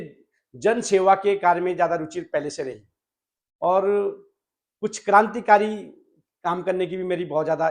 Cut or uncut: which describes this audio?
uncut